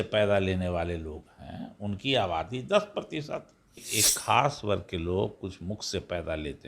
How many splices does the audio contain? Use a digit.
1